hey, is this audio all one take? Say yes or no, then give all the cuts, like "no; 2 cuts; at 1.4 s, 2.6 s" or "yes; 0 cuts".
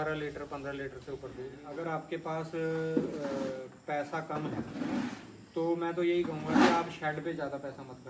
no; 1 cut; at 1.5 s